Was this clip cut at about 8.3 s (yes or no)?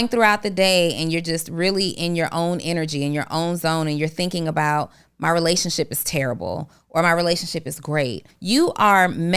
yes